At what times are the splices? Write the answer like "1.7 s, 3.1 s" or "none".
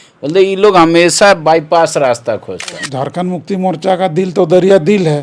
2.8 s